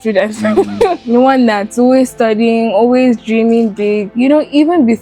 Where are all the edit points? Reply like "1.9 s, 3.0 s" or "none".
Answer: 1.0 s, 4.1 s